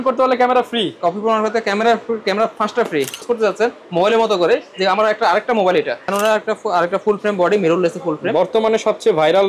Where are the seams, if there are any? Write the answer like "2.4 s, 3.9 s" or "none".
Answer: 3.2 s, 6.0 s